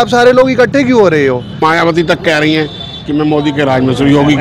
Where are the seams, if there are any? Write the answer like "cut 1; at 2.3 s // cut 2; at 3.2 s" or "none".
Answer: cut 1; at 1.6 s